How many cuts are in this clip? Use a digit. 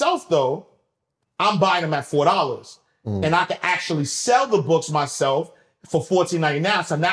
0